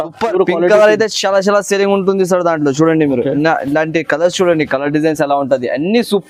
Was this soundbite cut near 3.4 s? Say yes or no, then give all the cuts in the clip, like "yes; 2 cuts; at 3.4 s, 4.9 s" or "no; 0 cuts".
no; 0 cuts